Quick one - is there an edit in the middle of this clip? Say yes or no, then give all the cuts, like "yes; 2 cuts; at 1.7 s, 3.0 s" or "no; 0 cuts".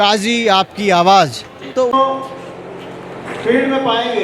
yes; 1 cut; at 1.9 s